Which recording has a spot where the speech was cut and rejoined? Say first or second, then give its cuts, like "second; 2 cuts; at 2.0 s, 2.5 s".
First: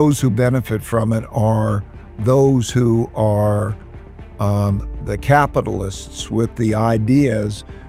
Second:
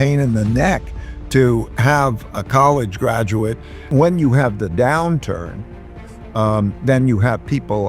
second; 1 cut; at 3.7 s